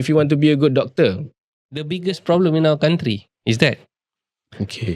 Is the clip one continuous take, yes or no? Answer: no